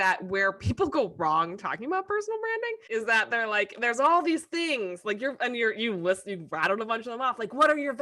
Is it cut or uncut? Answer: cut